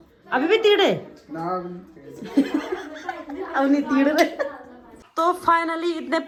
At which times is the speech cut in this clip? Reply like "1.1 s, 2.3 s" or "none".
none